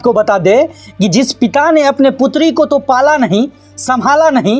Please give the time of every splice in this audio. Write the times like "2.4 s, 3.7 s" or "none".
none